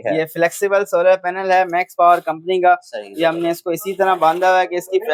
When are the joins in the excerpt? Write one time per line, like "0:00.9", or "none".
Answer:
none